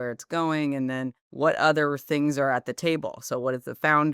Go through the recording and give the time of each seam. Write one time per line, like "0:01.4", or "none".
0:01.2